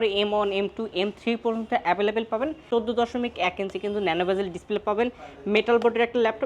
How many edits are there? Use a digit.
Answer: 1